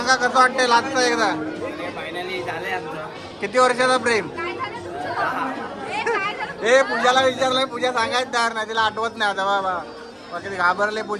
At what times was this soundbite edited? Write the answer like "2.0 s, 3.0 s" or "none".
none